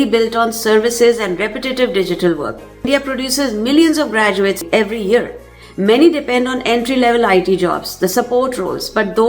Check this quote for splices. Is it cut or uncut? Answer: cut